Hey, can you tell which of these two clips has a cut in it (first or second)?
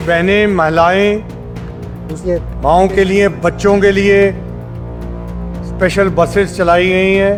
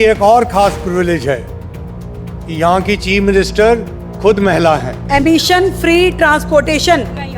second